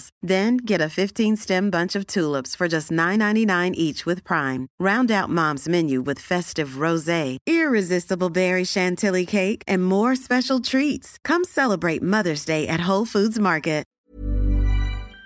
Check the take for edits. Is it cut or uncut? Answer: cut